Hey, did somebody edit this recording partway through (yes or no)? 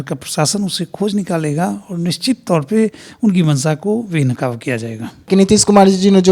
yes